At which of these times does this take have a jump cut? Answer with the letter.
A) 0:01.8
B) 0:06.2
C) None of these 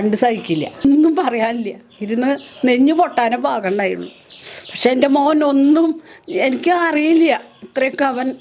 C